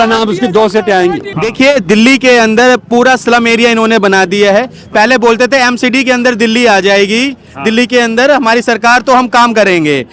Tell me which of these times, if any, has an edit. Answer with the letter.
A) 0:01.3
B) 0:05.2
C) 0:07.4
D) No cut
A